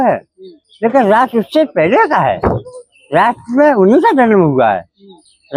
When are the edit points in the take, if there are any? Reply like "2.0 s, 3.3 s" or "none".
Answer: none